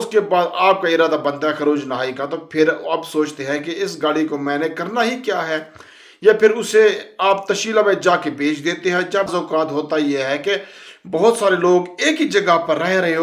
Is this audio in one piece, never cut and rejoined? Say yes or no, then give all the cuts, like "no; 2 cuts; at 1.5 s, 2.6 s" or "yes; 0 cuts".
no; 1 cut; at 9.3 s